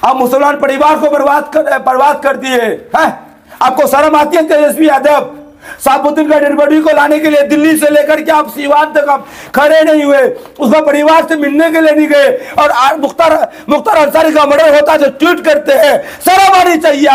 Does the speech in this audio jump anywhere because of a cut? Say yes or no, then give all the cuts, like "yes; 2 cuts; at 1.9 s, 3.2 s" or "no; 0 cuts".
no; 0 cuts